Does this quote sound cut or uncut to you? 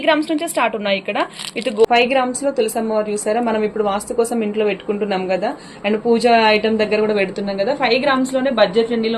cut